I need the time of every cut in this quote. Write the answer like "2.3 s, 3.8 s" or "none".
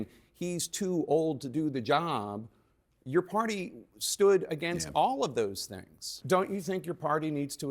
6.2 s